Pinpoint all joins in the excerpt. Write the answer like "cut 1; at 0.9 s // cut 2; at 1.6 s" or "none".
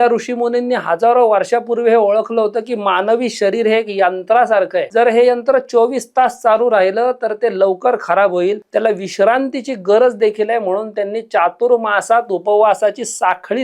cut 1; at 4.8 s // cut 2; at 8.6 s